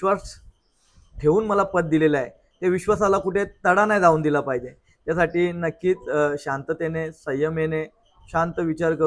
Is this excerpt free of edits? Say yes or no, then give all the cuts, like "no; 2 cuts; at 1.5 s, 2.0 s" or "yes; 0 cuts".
yes; 0 cuts